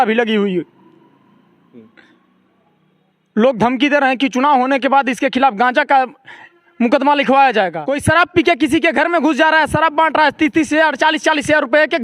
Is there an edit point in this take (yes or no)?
yes